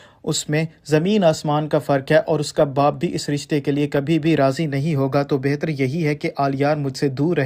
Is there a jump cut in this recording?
yes; 1 cut; at 5.6 s

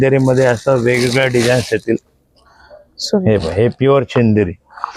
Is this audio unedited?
yes; 0 cuts

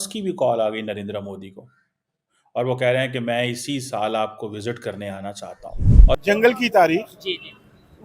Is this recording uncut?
no; 1 cut; at 6.1 s

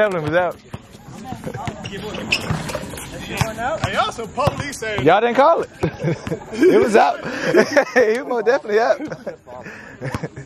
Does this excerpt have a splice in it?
no; 0 cuts

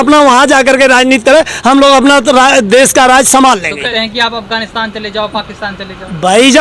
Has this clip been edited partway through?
yes; 1 cut; at 3.9 s

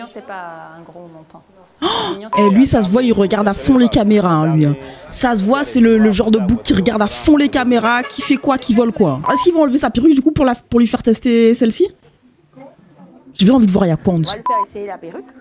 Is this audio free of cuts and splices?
no; 2 cuts; at 2.3 s, 9.3 s

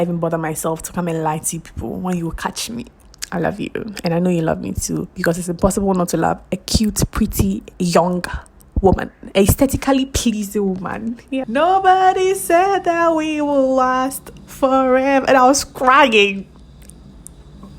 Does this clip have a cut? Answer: yes; 2 cuts; at 3.0 s, 11.5 s

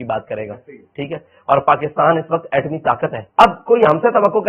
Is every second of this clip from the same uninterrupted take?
no; 1 cut; at 3.2 s

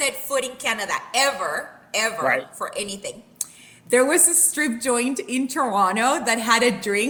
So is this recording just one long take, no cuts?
yes; 0 cuts

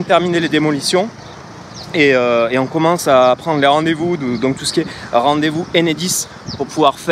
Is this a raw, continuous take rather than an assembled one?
yes; 0 cuts

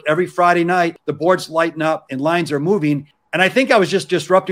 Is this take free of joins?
no; 3 cuts; at 0.9 s, 2.1 s, 3.2 s

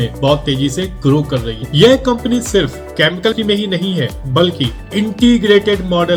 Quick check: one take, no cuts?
yes; 0 cuts

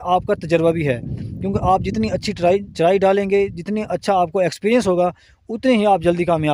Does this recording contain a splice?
no; 0 cuts

